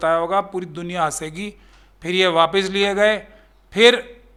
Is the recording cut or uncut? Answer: uncut